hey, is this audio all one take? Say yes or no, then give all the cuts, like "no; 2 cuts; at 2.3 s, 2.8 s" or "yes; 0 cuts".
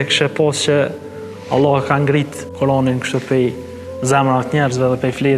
no; 1 cut; at 2.4 s